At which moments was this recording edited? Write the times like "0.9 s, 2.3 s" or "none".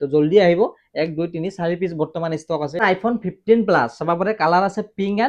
2.8 s